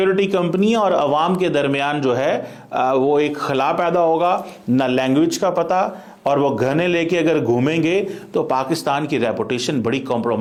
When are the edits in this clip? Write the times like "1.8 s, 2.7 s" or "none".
none